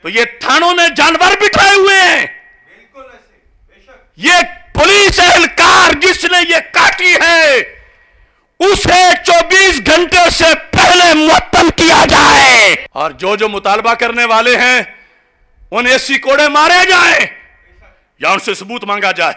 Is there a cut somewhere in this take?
no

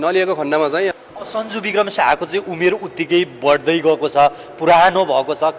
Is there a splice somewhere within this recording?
yes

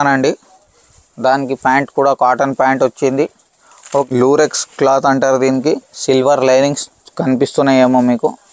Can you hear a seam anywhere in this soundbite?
yes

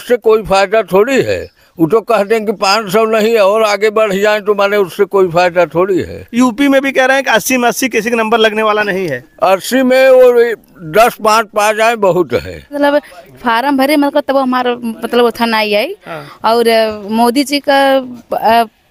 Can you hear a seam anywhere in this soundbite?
yes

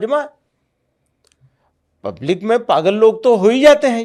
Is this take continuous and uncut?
yes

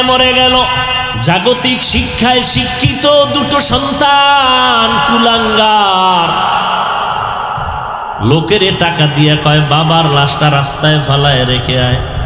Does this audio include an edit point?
yes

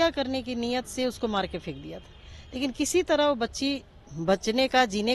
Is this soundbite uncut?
yes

